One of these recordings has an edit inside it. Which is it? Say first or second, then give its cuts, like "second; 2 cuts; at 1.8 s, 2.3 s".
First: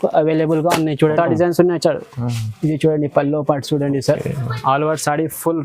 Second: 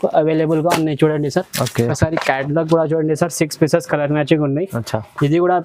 first; 1 cut; at 1.1 s